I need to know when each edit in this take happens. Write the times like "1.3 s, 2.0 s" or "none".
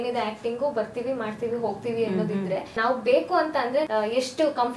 2.8 s, 3.9 s